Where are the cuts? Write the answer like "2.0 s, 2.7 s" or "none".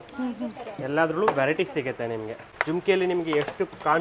2.5 s